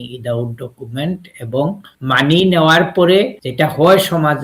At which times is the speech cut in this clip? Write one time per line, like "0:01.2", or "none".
0:01.9
0:03.4